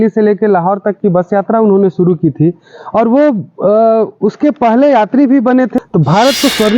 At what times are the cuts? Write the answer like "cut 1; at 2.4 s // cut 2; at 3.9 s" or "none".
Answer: cut 1; at 5.7 s